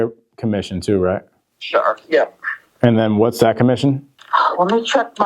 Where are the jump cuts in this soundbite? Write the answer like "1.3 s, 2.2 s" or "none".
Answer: 4.1 s